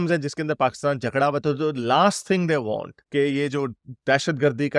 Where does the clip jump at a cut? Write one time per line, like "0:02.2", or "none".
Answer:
none

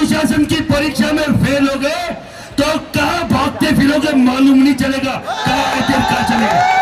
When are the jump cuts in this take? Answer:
none

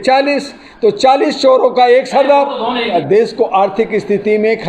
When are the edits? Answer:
0:02.9

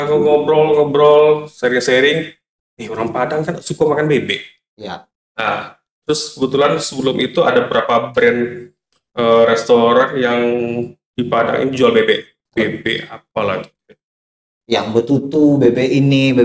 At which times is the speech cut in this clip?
none

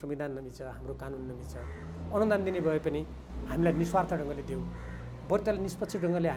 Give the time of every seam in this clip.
none

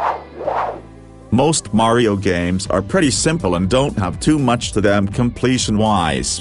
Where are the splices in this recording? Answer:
0:01.2

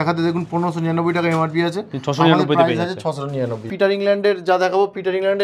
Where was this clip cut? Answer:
0:03.6

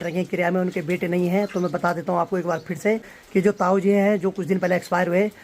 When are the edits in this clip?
0:03.2

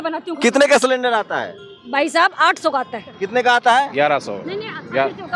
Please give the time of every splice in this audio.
0:03.2

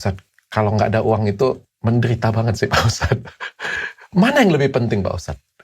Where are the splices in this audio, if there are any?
none

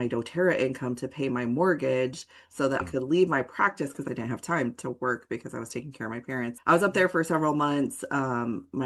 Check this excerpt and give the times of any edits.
0:02.8
0:04.1
0:06.6

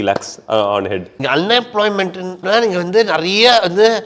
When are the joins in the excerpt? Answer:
0:01.1

